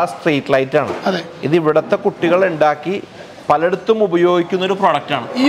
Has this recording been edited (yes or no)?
no